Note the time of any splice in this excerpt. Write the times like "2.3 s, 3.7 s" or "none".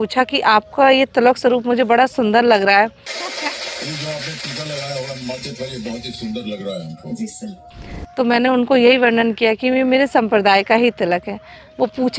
none